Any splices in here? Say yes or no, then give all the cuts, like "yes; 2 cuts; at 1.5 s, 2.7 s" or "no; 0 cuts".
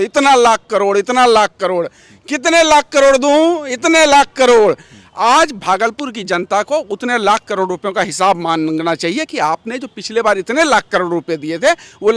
no; 0 cuts